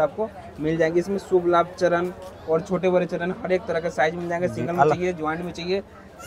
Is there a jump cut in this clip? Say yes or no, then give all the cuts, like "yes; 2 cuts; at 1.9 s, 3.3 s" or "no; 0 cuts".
no; 0 cuts